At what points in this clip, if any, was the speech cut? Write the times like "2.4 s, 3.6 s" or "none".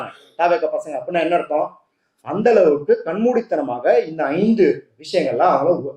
none